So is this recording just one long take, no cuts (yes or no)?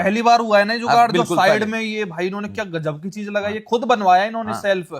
yes